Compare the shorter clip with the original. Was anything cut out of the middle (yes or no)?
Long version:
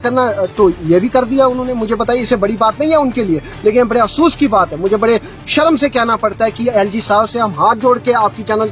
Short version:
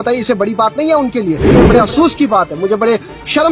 yes